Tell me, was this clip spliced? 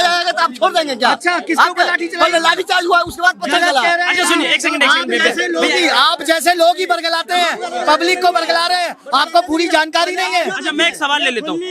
no; 0 cuts

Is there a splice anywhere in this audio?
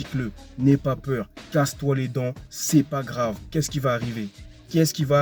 no; 0 cuts

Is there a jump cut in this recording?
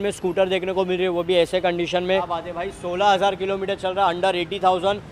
yes; 1 cut; at 2.4 s

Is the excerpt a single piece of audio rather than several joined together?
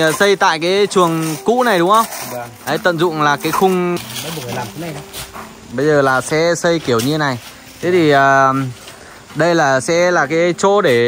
no; 1 cut; at 4.0 s

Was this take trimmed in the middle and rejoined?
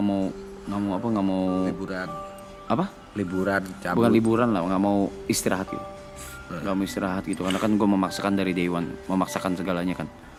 no; 0 cuts

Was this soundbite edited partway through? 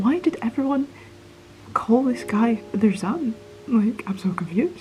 no; 0 cuts

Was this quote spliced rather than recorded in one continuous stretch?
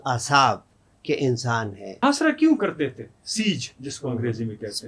yes; 1 cut; at 2.0 s

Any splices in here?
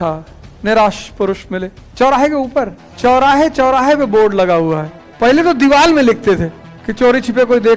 yes; 2 cuts; at 2.8 s, 5.0 s

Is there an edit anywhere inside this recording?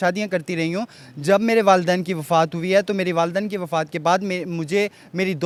no; 0 cuts

